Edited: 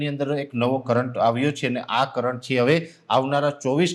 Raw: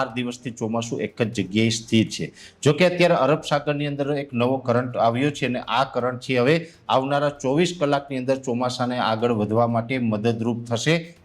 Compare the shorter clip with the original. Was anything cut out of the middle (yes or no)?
no